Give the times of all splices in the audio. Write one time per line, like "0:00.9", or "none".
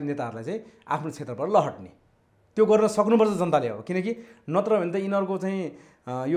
none